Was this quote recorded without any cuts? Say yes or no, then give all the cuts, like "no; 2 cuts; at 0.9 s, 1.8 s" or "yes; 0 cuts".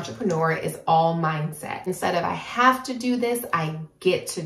no; 1 cut; at 1.9 s